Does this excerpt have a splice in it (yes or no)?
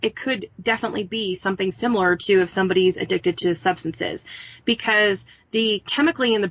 no